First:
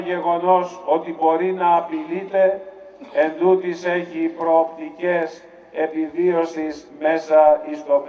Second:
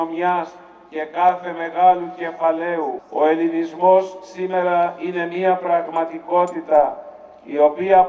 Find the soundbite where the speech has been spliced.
second; 1 cut; at 3.0 s

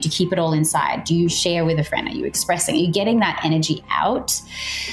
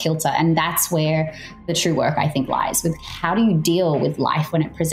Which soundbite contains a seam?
second; 1 cut; at 1.7 s

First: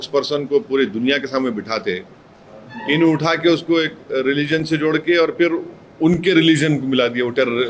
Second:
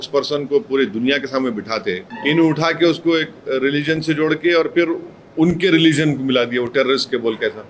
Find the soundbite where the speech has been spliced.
second; 2 cuts; at 2.1 s, 6.7 s

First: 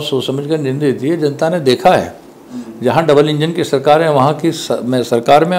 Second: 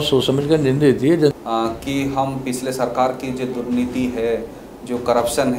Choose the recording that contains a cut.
second; 1 cut; at 1.3 s

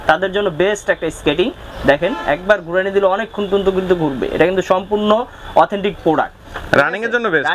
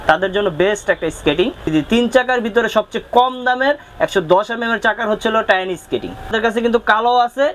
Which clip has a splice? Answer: second; 2 cuts; at 1.7 s, 6.3 s

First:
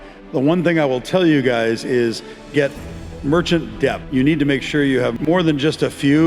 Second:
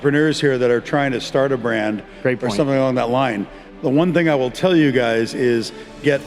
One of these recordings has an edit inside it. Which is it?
first; 2 cuts; at 4.0 s, 5.1 s

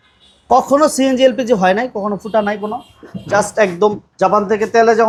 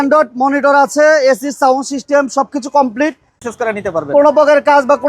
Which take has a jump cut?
second; 1 cut; at 3.4 s

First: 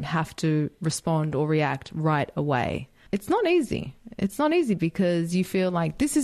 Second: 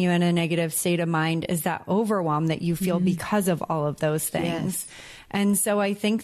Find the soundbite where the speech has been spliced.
first; 1 cut; at 3.0 s

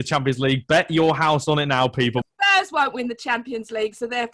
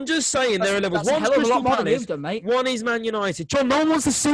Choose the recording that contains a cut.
first; 1 cut; at 2.2 s

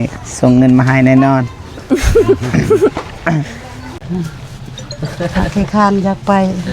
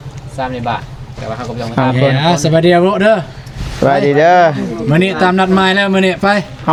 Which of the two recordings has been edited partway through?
first; 1 cut; at 4.0 s

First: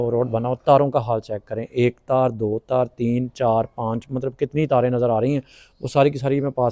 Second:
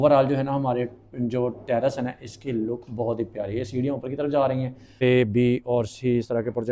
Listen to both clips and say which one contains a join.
second; 1 cut; at 4.9 s

